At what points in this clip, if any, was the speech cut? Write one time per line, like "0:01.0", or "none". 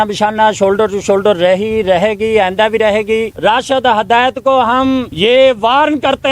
0:03.3
0:05.1